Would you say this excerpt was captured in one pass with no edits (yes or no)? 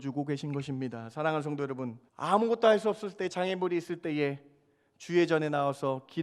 no